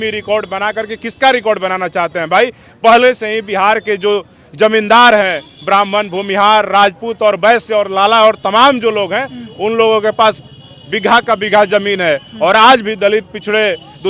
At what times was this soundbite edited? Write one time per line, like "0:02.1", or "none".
none